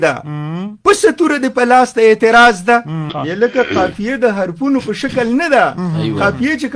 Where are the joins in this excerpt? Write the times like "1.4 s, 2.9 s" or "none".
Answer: 3.1 s